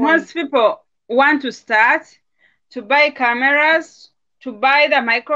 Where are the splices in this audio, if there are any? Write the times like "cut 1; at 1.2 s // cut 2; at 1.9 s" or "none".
cut 1; at 0.9 s